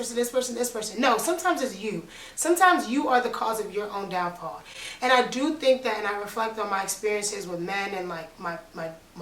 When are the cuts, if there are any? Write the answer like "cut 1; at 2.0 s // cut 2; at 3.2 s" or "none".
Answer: none